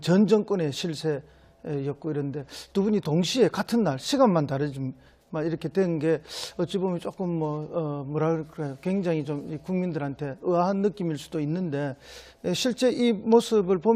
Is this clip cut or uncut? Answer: cut